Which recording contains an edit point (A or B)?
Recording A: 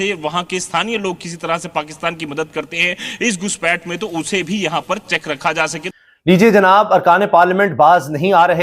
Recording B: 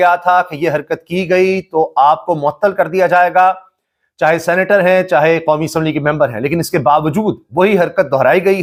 A